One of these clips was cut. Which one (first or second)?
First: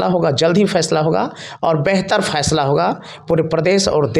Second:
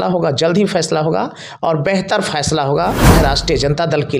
second